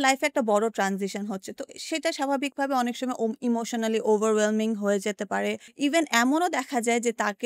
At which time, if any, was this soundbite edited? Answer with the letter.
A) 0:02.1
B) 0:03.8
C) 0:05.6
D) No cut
C